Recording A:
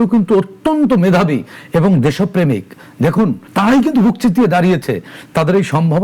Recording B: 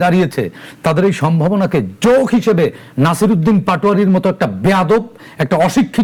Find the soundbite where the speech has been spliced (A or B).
A